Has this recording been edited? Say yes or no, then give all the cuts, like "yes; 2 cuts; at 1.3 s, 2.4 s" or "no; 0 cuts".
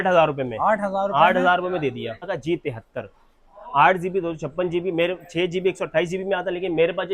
yes; 1 cut; at 2.3 s